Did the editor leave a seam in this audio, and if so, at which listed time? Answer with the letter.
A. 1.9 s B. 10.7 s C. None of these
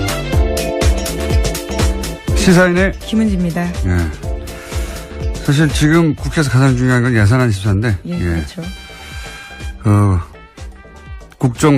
A